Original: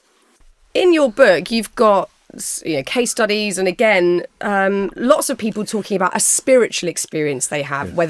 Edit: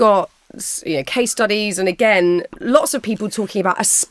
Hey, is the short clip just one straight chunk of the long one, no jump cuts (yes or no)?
no